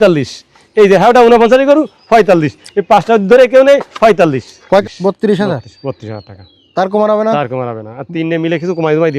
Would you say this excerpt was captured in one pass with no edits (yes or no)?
no